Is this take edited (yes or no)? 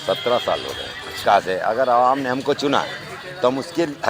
yes